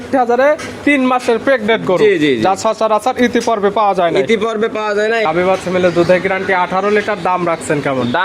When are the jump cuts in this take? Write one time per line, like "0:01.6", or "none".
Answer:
0:05.2